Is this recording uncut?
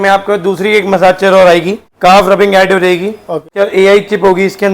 no; 2 cuts; at 1.8 s, 3.4 s

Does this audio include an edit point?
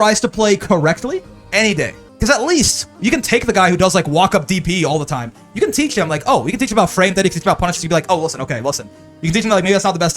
yes; 1 cut; at 2.0 s

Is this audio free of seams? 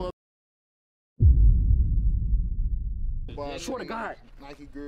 no; 1 cut; at 3.3 s

